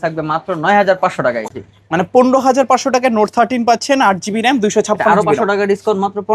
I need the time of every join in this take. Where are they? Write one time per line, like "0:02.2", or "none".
0:01.4